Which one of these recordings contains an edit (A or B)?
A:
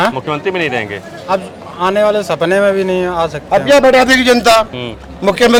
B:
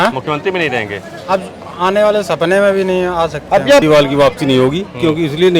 B